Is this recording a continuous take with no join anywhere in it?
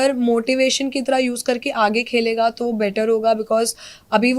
yes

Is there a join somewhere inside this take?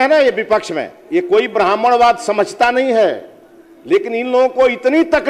no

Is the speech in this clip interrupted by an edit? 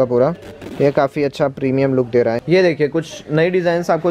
yes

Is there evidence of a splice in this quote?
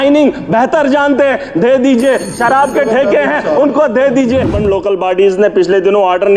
yes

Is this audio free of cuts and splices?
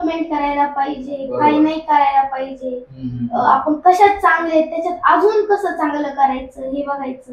yes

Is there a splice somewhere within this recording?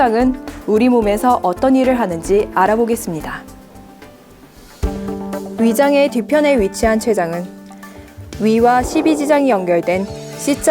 yes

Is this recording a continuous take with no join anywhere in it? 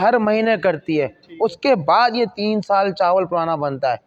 yes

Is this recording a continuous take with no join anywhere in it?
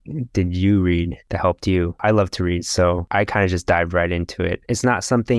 no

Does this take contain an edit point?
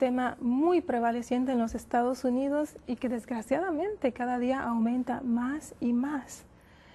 no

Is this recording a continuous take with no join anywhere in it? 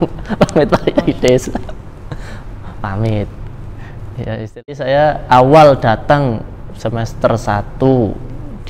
no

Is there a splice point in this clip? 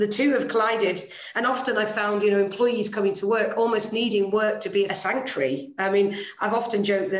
yes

